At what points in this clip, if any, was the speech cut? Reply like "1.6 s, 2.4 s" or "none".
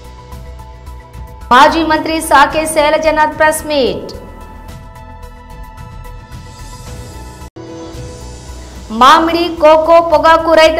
none